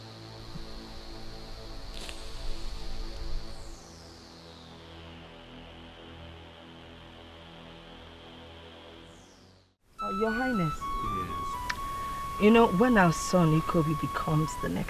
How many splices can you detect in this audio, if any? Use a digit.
1